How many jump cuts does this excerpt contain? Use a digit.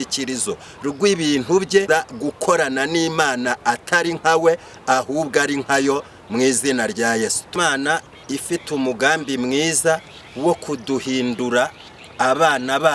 2